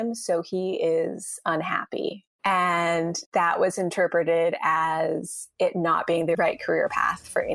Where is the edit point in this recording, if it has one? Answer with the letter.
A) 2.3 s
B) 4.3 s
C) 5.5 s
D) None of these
A